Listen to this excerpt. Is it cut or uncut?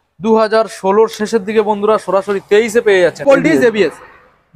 cut